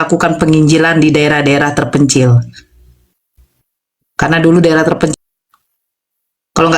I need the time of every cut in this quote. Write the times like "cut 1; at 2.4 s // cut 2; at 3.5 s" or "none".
cut 1; at 5.1 s